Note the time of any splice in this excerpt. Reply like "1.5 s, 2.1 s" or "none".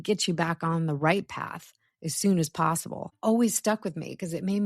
3.1 s